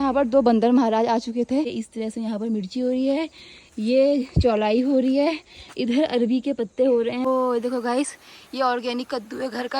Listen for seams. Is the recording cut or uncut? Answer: cut